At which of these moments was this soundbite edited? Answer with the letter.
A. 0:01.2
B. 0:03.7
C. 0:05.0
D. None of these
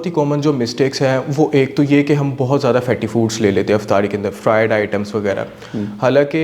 D